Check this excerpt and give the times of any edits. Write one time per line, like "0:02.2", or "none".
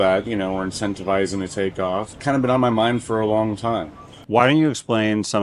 0:04.2